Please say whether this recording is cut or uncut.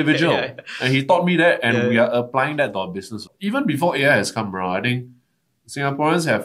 cut